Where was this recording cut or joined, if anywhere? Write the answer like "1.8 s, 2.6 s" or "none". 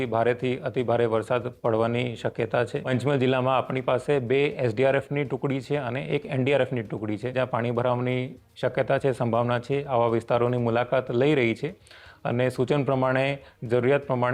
2.9 s, 7.3 s